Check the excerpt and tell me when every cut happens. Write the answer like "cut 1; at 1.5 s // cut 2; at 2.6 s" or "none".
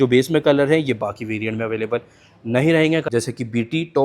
cut 1; at 3.0 s